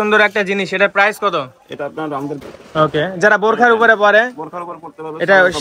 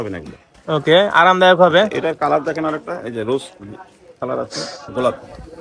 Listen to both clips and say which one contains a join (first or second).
first